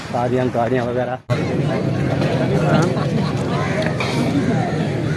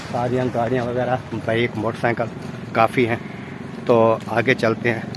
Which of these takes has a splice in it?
first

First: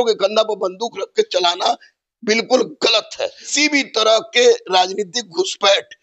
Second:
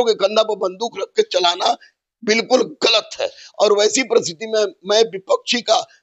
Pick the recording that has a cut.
first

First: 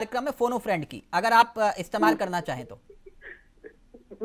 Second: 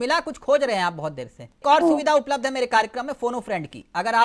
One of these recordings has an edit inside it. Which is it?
second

